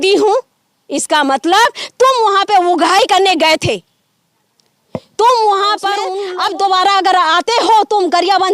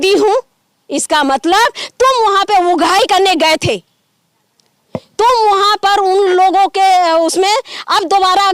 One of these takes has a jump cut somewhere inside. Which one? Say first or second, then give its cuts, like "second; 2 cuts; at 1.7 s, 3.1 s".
first; 1 cut; at 6.2 s